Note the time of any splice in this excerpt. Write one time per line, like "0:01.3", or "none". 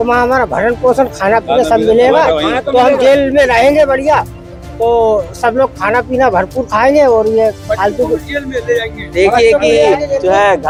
none